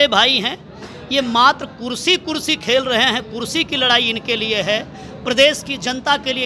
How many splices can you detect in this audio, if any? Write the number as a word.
zero